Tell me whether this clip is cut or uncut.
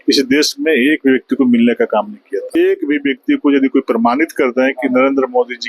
cut